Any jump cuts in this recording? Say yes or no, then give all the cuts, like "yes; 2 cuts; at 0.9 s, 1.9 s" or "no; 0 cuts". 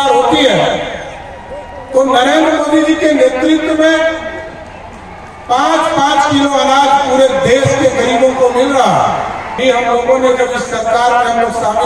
yes; 1 cut; at 9.5 s